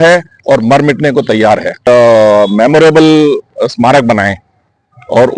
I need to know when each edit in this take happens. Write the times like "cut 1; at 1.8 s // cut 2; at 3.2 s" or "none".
cut 1; at 1.8 s